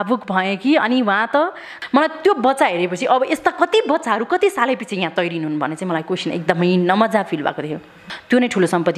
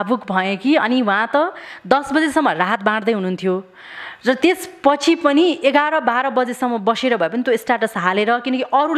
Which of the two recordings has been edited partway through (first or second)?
first